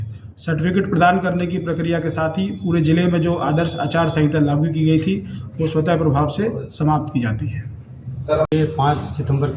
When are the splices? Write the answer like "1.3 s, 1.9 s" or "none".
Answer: 8.5 s